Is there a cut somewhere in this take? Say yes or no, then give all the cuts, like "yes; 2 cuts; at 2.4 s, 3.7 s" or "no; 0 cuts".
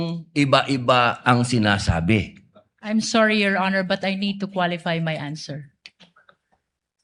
no; 0 cuts